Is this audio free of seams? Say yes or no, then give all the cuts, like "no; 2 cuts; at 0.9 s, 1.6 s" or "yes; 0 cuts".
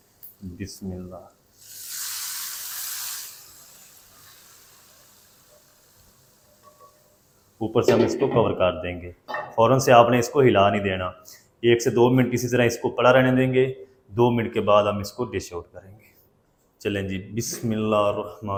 yes; 0 cuts